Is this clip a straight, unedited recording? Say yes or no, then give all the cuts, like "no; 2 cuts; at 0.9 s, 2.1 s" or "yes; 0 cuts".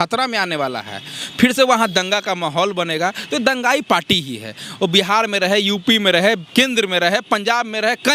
yes; 0 cuts